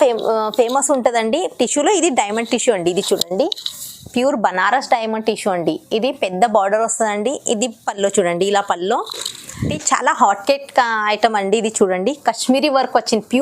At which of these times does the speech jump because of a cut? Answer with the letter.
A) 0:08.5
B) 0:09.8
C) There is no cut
B